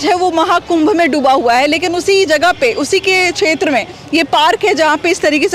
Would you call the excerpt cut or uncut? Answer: uncut